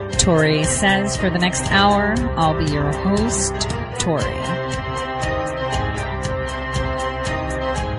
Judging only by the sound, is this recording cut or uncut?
uncut